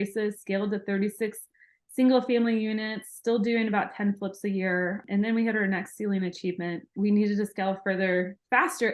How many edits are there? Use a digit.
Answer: 2